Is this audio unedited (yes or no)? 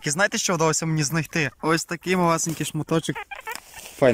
no